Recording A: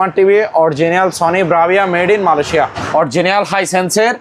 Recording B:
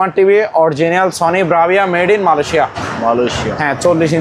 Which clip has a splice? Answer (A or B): A